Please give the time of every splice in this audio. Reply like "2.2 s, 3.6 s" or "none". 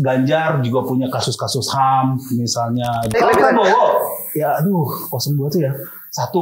3.2 s